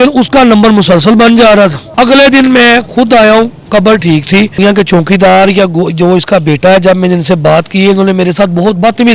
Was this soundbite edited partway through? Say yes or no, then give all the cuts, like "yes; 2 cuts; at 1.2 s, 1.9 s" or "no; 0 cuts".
yes; 2 cuts; at 1.8 s, 4.5 s